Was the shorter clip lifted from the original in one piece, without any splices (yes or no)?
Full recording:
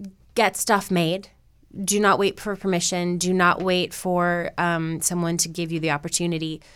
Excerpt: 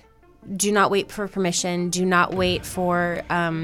yes